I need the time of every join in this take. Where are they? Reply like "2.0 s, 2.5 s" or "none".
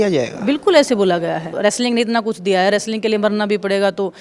1.5 s